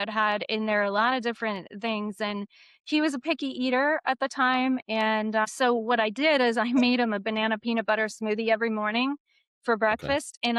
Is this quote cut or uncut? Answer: uncut